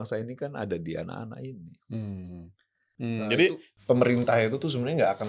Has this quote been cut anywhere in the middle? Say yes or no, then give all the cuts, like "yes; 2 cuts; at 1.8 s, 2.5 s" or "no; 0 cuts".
yes; 1 cut; at 2.9 s